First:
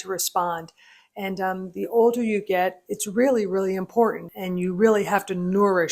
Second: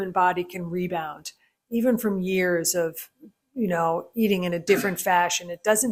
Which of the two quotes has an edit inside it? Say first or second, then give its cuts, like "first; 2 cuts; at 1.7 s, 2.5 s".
first; 1 cut; at 4.3 s